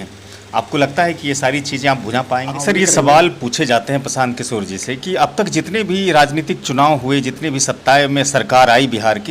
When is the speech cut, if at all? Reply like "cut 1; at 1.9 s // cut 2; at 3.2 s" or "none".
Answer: cut 1; at 2.6 s